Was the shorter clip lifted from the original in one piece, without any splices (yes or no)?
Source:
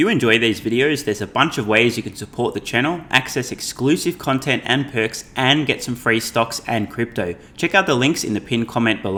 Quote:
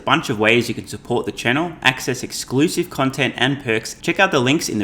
no